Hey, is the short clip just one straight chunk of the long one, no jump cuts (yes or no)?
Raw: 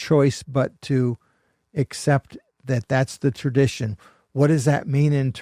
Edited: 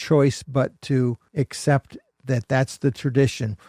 no